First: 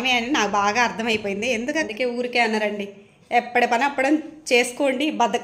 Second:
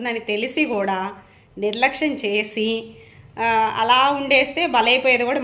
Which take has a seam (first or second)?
first